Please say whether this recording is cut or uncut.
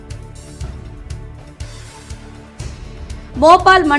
cut